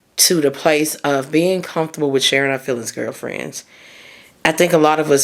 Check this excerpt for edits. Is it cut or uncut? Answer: uncut